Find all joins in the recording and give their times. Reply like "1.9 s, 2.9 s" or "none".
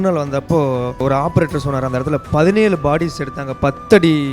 1.0 s